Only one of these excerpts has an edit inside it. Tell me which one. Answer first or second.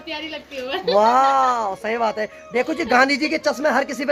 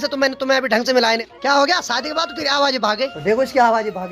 second